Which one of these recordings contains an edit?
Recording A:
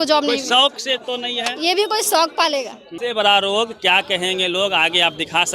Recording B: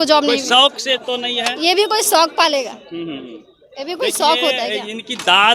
A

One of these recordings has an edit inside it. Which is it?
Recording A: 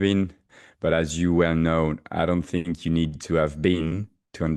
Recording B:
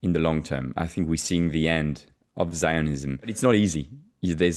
B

